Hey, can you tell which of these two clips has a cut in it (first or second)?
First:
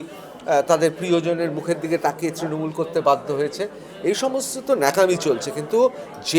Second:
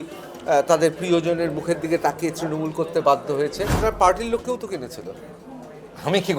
second